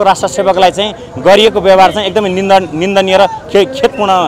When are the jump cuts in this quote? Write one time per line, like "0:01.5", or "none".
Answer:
none